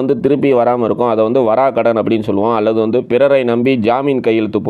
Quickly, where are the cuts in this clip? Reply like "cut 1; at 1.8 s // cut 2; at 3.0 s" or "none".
none